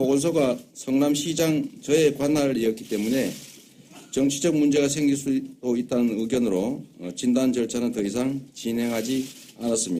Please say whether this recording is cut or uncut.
uncut